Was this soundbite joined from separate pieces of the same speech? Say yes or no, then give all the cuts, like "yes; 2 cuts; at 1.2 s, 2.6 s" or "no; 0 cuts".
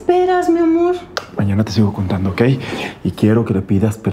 yes; 1 cut; at 1.0 s